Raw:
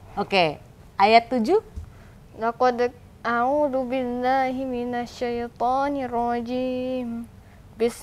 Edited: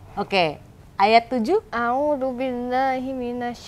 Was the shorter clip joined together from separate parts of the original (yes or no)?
yes